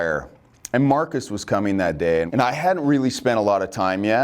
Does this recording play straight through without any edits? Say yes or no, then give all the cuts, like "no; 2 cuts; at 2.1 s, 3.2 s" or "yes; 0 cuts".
no; 1 cut; at 2.3 s